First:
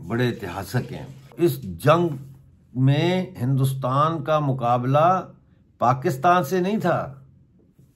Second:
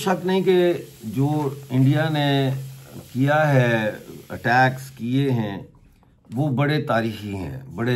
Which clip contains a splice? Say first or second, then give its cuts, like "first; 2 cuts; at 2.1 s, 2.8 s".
first; 1 cut; at 1.3 s